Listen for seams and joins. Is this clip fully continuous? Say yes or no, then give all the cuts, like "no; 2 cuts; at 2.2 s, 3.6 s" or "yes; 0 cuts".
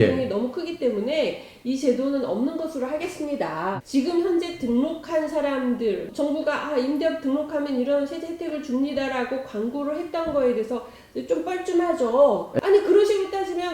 no; 3 cuts; at 3.7 s, 6.1 s, 12.5 s